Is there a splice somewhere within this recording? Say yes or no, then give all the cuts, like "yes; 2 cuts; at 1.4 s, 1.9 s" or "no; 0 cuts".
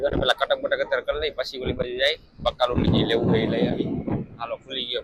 no; 0 cuts